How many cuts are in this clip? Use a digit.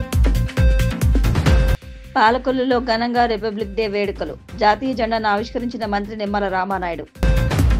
0